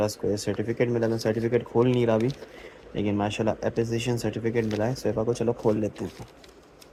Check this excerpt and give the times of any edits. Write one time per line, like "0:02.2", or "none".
none